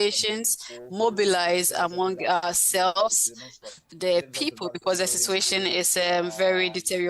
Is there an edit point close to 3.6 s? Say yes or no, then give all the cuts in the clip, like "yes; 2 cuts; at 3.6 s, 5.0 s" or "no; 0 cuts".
yes; 1 cut; at 3.6 s